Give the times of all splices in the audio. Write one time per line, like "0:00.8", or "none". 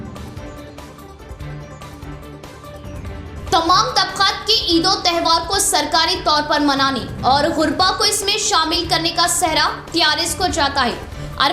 0:01.2